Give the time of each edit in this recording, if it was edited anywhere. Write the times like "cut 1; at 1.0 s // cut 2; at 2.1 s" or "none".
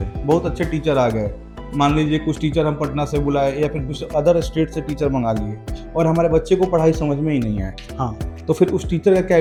none